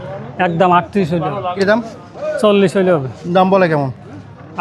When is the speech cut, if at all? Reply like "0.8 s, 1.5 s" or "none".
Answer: 1.5 s